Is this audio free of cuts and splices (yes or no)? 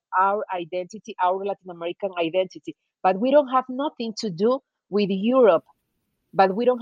yes